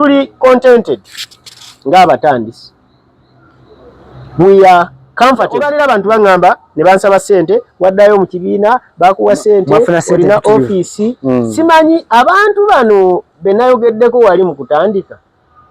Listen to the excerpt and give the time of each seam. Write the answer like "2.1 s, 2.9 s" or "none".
5.7 s